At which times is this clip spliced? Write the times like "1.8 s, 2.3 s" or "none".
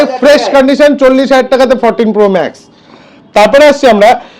none